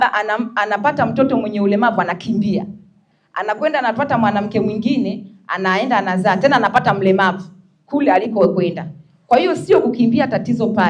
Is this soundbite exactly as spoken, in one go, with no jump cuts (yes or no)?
yes